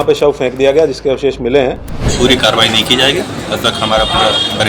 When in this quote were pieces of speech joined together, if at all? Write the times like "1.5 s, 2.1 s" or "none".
2.1 s